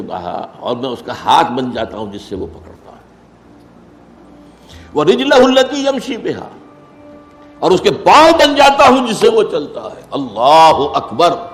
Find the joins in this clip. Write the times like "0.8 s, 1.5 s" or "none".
none